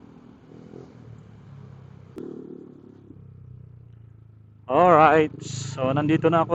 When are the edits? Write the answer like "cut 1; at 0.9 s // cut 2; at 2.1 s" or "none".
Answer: cut 1; at 2.2 s